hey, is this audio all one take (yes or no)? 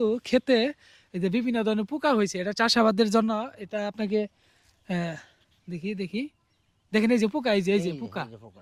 yes